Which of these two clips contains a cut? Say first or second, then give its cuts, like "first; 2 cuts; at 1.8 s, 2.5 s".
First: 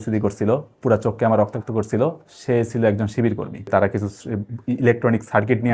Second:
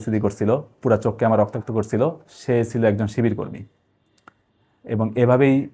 first; 1 cut; at 3.7 s